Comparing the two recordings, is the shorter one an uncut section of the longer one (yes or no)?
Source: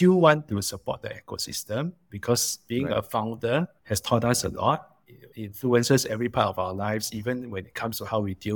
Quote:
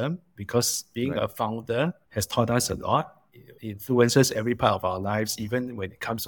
yes